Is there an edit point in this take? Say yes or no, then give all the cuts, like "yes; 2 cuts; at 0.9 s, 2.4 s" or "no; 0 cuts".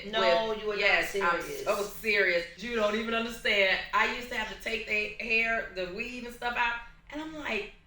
yes; 1 cut; at 2.6 s